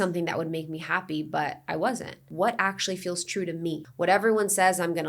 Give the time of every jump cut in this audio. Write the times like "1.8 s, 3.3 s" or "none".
2.3 s, 3.9 s